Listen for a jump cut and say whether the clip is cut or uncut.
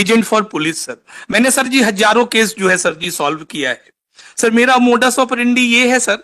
uncut